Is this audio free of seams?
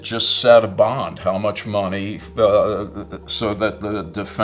yes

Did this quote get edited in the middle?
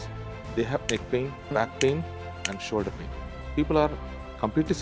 yes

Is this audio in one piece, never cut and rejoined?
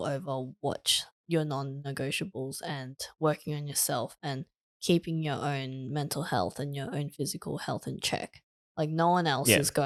yes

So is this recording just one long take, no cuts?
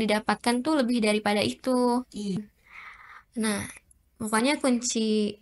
no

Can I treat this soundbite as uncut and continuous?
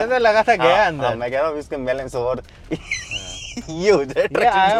yes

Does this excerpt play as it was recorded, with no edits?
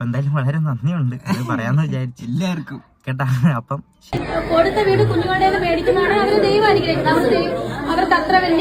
no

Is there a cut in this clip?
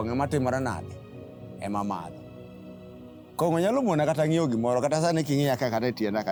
no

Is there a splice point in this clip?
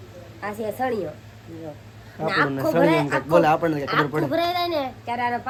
no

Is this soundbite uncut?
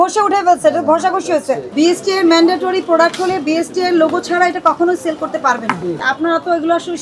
no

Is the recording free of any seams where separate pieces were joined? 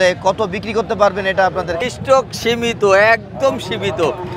no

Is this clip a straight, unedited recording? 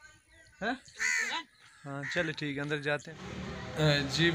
no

